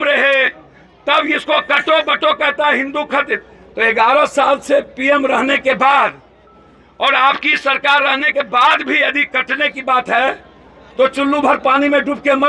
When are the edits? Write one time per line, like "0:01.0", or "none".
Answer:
none